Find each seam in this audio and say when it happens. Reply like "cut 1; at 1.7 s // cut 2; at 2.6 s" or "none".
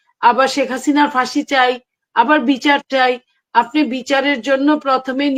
none